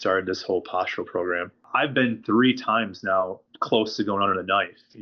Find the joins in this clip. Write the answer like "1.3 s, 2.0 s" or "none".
1.6 s, 3.5 s

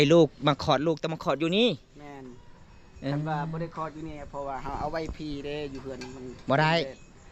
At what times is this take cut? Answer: none

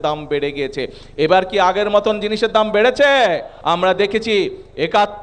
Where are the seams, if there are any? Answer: 3.5 s

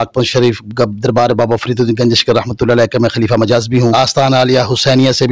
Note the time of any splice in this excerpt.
3.9 s

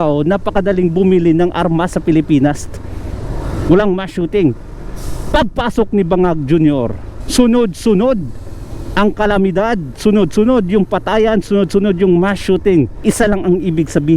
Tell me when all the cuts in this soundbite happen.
12.9 s

